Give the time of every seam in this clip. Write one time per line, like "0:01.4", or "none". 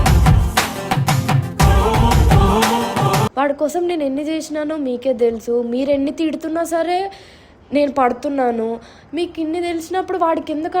0:03.3

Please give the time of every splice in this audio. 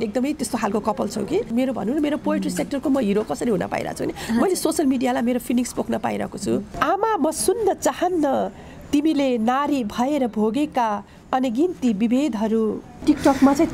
0:01.5
0:06.7
0:13.0

